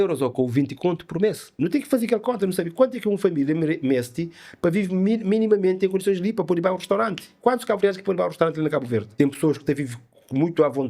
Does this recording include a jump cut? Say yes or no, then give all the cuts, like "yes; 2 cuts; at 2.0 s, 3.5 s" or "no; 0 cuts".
yes; 2 cuts; at 1.5 s, 9.1 s